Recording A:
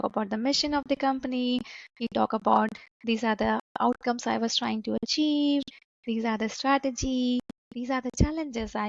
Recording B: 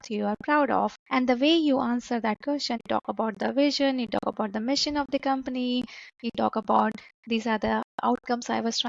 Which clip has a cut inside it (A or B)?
B